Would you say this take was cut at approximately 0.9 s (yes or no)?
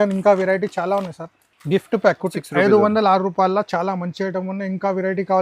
no